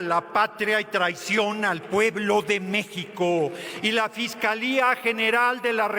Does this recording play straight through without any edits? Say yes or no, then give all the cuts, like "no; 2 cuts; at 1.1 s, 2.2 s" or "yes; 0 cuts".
yes; 0 cuts